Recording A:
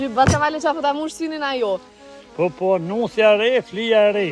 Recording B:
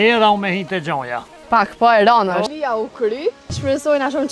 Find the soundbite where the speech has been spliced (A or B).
B